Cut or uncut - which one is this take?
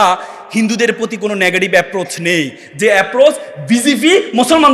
uncut